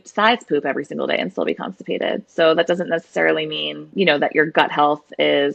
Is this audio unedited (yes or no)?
yes